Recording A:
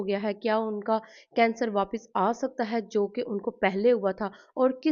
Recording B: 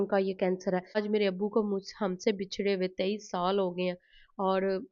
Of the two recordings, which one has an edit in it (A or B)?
B